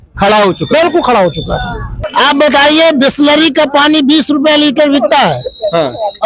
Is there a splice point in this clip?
yes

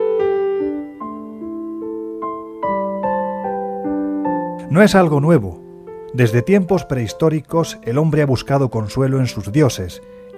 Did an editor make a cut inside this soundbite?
no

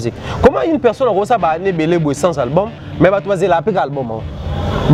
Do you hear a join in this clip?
no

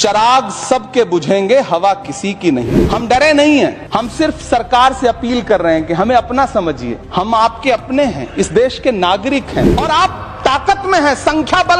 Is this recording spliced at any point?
yes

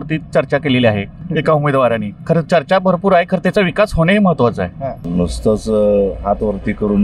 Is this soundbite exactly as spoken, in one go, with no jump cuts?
no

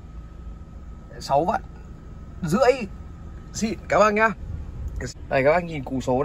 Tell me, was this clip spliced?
yes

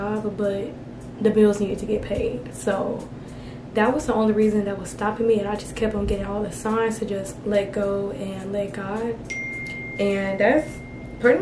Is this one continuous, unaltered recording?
yes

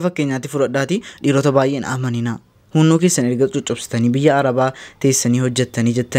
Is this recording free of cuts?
yes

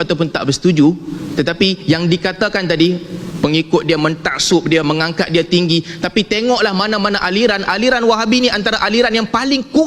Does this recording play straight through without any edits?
yes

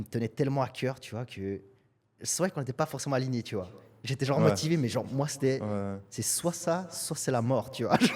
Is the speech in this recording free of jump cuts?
yes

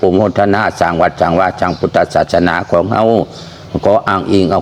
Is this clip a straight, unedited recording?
yes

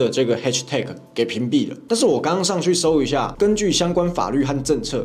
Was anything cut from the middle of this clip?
yes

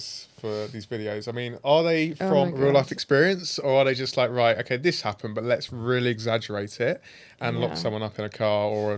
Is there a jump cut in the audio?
no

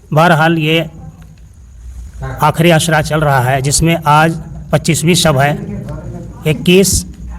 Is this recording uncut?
yes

